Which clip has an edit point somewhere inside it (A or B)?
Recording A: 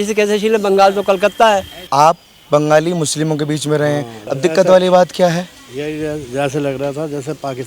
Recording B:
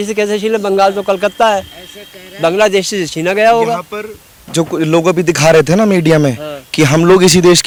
A